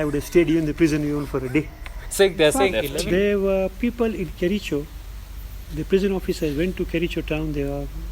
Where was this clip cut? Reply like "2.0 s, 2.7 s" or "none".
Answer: 2.7 s